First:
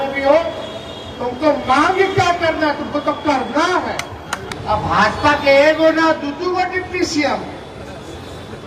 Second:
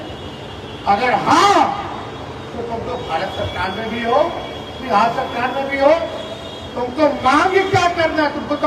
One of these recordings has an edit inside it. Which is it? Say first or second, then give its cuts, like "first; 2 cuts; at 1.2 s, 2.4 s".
first; 1 cut; at 4.5 s